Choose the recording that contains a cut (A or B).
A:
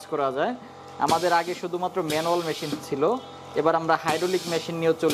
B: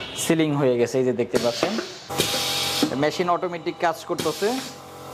B